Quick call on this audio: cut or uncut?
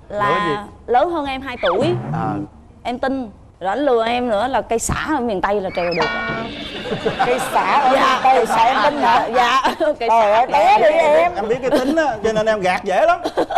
uncut